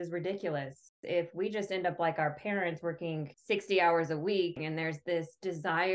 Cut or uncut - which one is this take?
cut